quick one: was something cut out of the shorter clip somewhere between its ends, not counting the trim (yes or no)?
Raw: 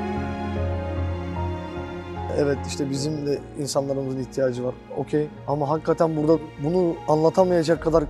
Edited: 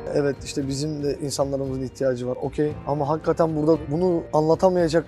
yes